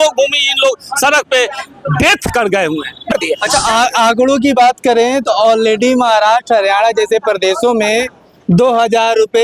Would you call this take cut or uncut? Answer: cut